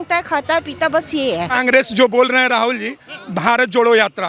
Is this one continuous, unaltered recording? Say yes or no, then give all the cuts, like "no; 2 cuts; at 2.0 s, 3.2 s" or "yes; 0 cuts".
no; 1 cut; at 1.6 s